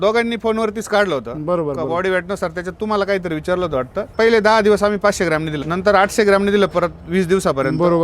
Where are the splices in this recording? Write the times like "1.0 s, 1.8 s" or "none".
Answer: 4.1 s, 5.6 s